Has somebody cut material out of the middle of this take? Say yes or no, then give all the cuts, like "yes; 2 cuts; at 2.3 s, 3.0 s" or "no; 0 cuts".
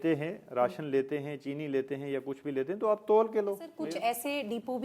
yes; 1 cut; at 3.7 s